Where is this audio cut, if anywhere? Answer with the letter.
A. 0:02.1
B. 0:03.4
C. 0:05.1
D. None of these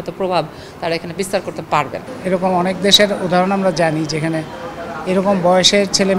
A